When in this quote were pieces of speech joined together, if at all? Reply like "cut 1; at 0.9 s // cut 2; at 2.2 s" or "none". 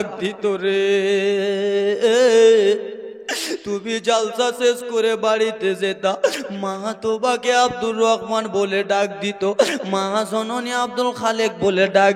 none